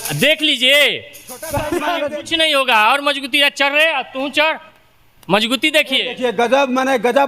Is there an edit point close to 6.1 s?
no; 1 cut; at 2.0 s

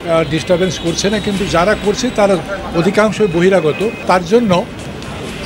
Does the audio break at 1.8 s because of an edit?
no; 1 cut; at 4.0 s

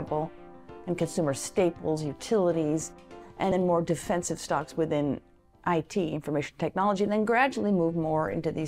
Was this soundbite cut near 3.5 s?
yes; 1 cut; at 3.5 s

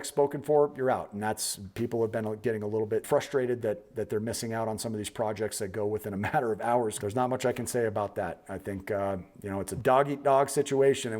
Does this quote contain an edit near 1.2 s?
no; 3 cuts; at 3.1 s, 7.0 s, 9.7 s

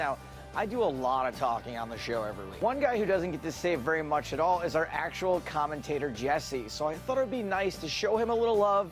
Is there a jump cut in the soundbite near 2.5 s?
yes; 1 cut; at 2.5 s

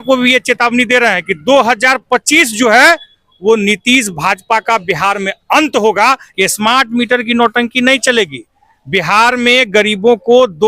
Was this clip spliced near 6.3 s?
yes; 1 cut; at 6.3 s

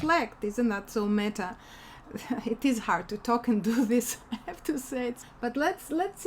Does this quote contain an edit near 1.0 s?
no; 1 cut; at 5.2 s

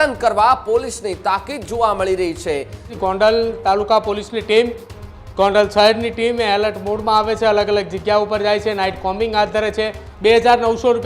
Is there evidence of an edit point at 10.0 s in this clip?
yes; 2 cuts; at 2.9 s, 10.0 s

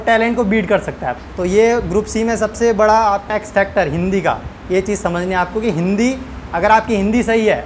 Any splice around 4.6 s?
no; 2 cuts; at 1.1 s, 3.3 s

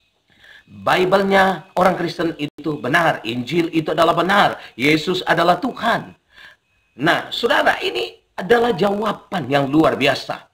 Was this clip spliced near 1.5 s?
no; 0 cuts

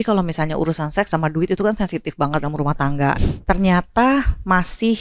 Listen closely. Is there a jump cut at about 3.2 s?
yes; 1 cut; at 3.2 s

